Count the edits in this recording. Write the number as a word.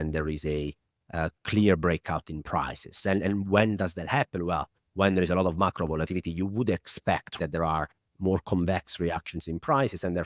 one